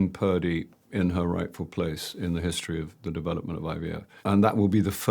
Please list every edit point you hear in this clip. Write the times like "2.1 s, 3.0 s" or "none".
4.1 s